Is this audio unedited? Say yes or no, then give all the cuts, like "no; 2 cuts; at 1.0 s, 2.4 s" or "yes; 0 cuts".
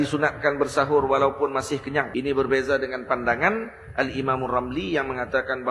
no; 1 cut; at 2.1 s